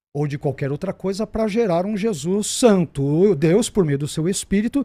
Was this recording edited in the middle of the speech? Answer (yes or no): no